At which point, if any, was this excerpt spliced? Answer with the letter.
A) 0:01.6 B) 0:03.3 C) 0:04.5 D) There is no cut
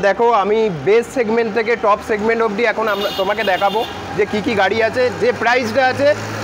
D